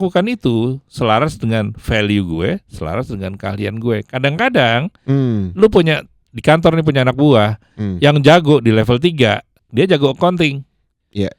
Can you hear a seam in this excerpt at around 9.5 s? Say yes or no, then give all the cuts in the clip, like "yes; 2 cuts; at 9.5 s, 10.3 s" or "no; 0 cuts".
yes; 1 cut; at 9.5 s